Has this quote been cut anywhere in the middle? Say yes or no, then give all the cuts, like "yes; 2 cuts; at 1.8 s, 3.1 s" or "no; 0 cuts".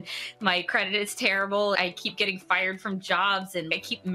yes; 1 cut; at 1.8 s